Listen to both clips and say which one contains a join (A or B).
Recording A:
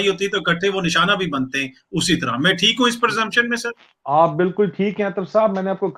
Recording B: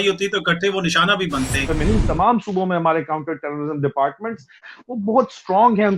B